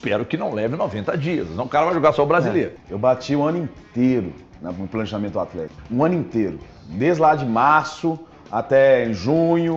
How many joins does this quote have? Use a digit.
2